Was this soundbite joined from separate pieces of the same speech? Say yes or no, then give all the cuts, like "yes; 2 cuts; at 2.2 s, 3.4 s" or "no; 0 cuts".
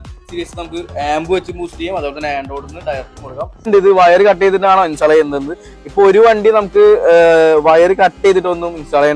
yes; 1 cut; at 3.7 s